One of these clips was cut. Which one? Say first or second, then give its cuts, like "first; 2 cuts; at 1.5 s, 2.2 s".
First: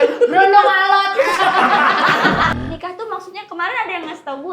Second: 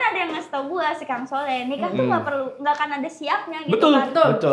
first; 1 cut; at 2.5 s